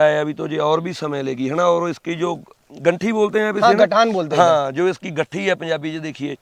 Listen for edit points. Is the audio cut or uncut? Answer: uncut